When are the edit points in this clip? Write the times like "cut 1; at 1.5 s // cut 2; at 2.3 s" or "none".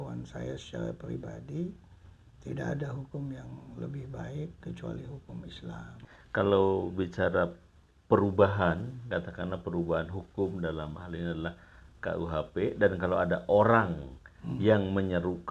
cut 1; at 6.0 s